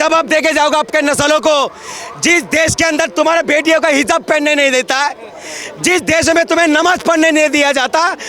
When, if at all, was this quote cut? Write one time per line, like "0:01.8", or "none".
none

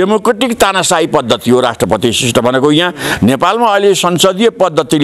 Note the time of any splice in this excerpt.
none

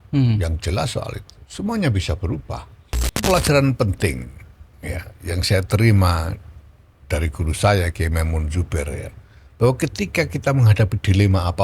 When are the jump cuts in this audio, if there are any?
0:03.2

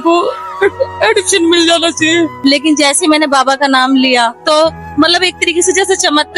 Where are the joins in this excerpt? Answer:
0:02.3
0:04.4

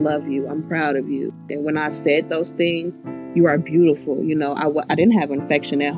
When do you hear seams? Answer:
0:01.5

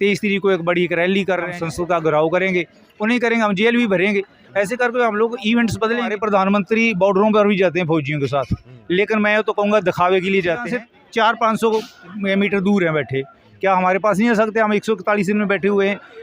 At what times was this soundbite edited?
0:01.5
0:06.2
0:10.7

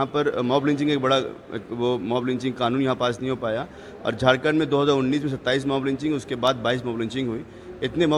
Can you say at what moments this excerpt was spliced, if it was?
none

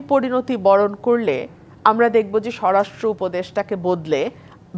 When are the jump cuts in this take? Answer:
none

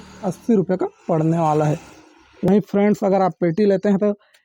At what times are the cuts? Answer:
0:02.5

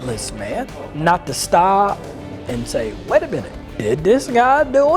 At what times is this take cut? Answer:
0:00.9
0:03.6

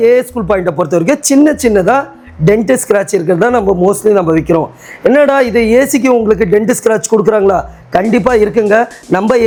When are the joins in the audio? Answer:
none

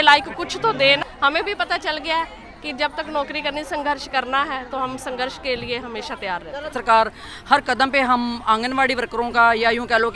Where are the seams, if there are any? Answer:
0:01.0
0:06.7

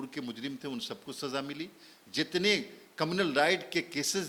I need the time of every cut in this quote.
none

